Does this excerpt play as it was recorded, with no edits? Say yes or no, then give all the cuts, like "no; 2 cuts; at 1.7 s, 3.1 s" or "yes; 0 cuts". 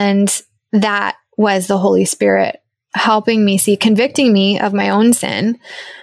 yes; 0 cuts